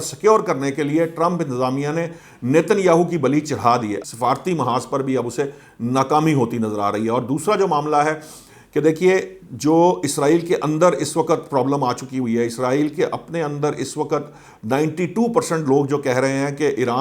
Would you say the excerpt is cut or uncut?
cut